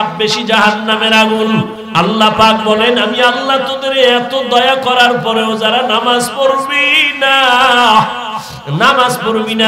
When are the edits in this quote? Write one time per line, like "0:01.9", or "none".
0:01.8